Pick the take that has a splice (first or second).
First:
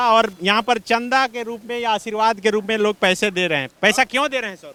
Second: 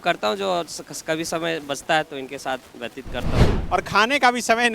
second